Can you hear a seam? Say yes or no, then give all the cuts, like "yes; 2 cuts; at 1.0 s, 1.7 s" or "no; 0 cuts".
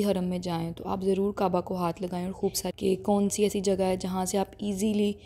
yes; 1 cut; at 2.6 s